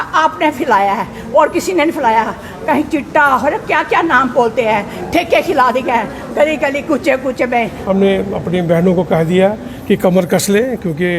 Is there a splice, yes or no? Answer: yes